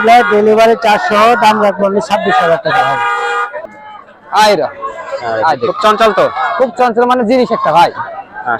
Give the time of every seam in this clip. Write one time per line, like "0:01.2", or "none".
0:03.6